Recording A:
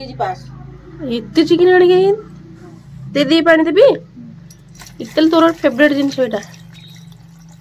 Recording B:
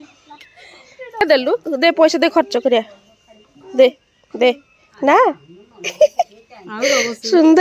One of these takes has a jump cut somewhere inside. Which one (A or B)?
B